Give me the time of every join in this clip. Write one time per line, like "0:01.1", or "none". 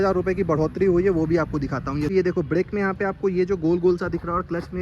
0:02.1